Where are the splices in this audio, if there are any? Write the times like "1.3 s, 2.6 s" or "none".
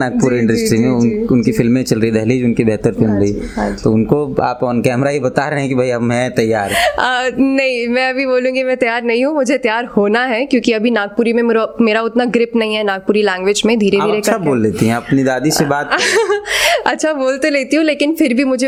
none